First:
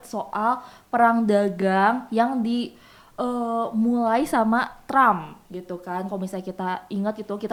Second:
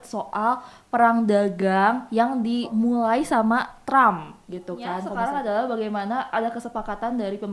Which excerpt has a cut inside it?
second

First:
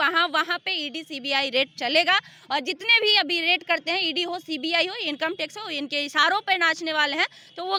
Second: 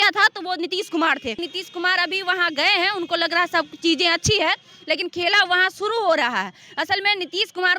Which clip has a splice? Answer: second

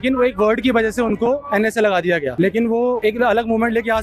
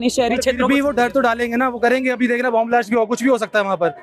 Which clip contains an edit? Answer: first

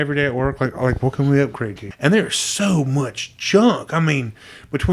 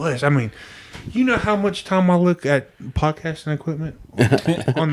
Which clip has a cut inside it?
first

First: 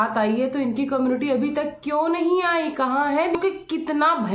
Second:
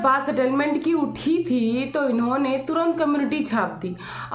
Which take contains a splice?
first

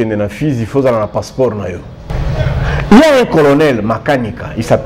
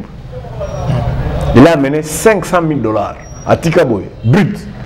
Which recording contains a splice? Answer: first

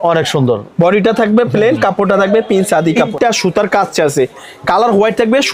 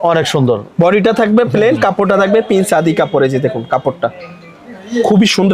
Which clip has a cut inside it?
first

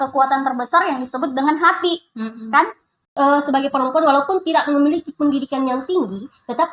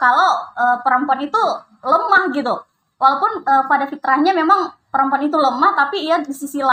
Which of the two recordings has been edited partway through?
first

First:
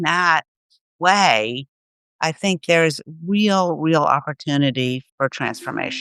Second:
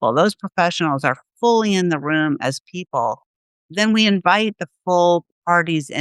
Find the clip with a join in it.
first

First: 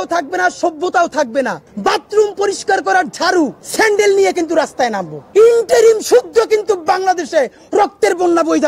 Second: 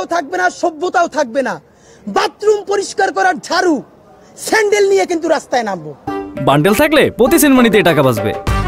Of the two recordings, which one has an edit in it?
first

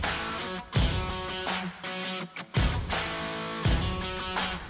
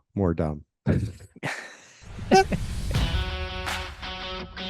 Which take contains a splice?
second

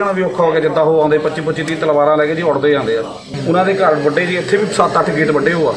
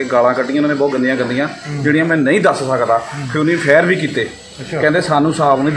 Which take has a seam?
first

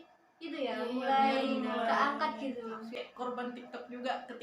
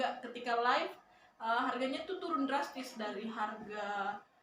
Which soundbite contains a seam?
first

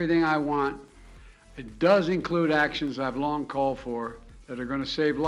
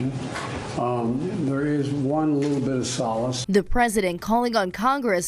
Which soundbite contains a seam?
second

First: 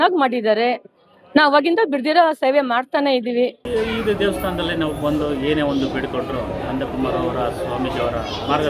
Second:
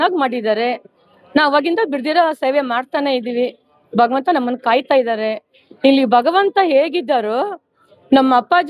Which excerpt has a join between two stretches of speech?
first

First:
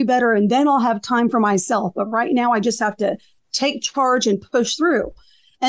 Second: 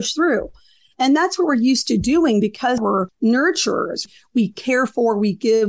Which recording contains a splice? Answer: second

